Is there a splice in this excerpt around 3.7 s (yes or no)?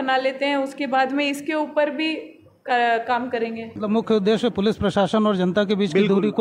yes